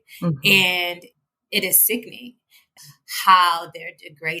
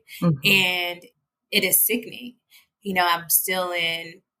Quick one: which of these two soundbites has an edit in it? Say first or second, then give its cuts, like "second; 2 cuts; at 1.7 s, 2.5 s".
first; 1 cut; at 2.7 s